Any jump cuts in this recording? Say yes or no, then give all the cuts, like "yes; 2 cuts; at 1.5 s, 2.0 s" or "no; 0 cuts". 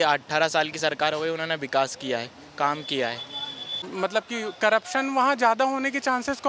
yes; 1 cut; at 3.9 s